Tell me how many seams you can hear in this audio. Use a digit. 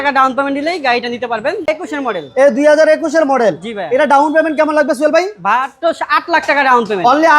1